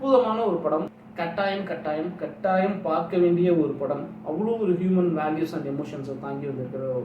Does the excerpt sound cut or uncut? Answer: cut